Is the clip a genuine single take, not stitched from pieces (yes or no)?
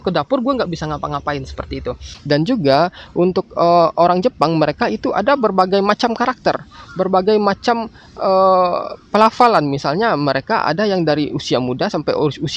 no